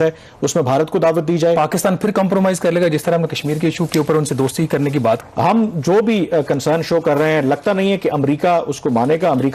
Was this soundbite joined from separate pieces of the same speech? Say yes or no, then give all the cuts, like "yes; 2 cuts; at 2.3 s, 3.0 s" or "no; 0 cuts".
yes; 2 cuts; at 1.6 s, 5.2 s